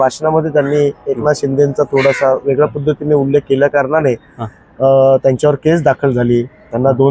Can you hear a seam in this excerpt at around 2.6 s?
no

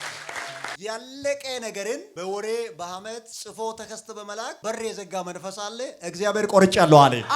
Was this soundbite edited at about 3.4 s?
yes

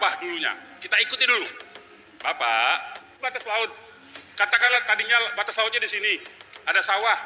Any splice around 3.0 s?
yes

